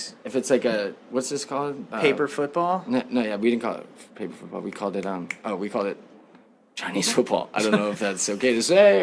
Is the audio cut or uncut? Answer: cut